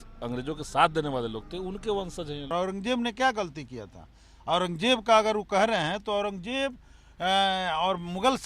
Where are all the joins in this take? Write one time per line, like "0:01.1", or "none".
0:02.5